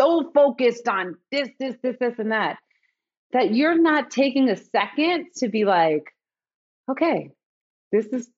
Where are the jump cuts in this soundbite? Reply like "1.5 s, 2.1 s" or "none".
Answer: none